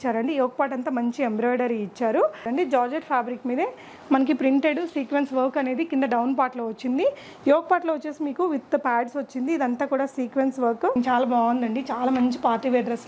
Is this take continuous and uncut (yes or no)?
no